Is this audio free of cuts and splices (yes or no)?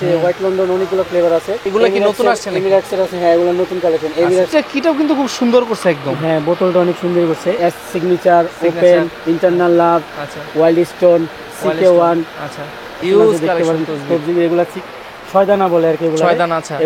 no